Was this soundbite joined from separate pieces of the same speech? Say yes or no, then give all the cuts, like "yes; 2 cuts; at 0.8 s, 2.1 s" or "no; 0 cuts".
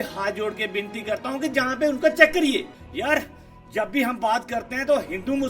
yes; 1 cut; at 2.6 s